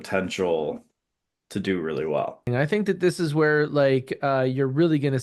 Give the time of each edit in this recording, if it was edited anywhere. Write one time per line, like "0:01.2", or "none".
0:02.5